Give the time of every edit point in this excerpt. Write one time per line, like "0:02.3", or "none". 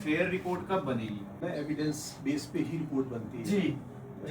0:01.4